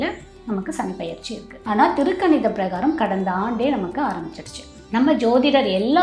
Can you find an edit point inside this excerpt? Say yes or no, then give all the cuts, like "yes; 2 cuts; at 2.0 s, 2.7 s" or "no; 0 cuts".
yes; 2 cuts; at 1.6 s, 4.8 s